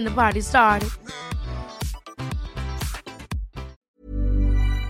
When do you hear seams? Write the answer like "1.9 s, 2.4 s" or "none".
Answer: 3.8 s